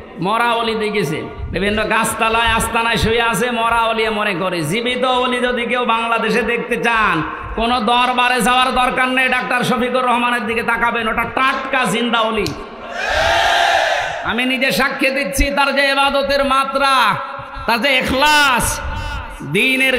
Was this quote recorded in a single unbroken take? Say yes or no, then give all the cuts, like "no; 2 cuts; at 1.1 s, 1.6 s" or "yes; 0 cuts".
no; 1 cut; at 1.4 s